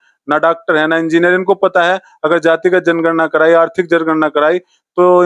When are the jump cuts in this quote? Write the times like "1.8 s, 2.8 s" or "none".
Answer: none